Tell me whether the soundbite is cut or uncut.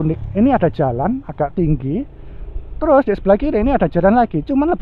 uncut